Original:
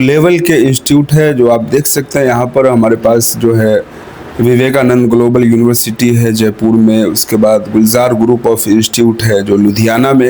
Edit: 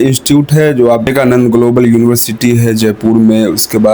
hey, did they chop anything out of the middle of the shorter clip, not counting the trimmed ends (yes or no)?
yes